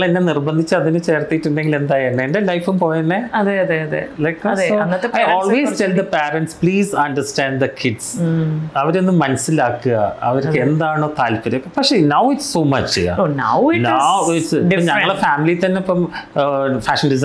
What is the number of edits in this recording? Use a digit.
0